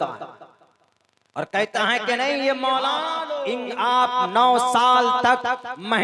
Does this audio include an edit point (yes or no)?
yes